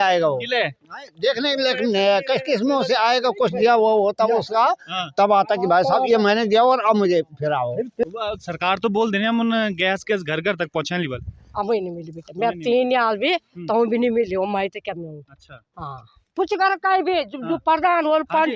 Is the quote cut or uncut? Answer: cut